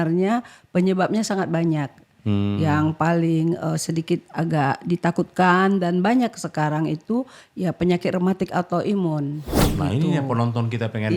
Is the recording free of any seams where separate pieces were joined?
no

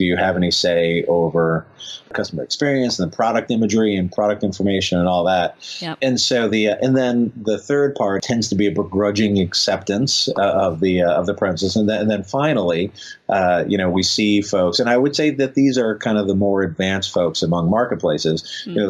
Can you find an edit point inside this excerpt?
yes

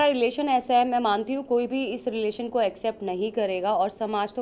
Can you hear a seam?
no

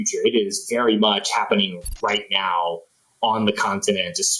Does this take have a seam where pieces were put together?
no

